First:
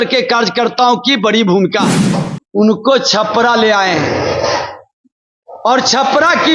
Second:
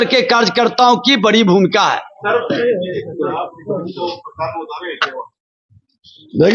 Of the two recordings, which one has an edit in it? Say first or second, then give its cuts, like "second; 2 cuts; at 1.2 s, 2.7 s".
first; 1 cut; at 2.2 s